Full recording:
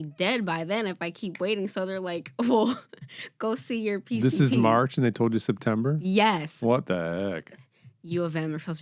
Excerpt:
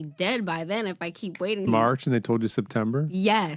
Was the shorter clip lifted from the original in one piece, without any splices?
no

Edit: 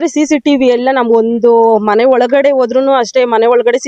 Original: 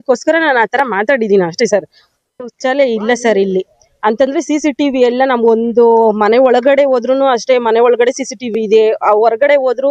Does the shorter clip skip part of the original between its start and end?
no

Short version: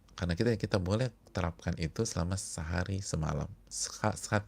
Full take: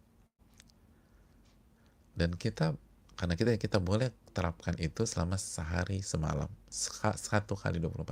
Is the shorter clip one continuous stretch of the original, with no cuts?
yes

